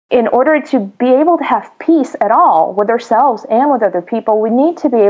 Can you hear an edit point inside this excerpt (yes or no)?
yes